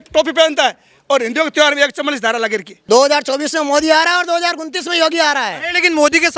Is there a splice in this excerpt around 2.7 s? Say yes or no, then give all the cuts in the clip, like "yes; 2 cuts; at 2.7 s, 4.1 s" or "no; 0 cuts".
yes; 1 cut; at 2.7 s